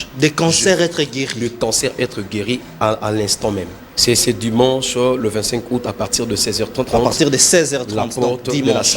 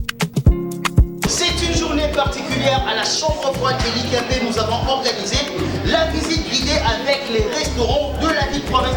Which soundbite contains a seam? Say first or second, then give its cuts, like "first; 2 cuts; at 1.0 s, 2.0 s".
first; 2 cuts; at 3.8 s, 6.9 s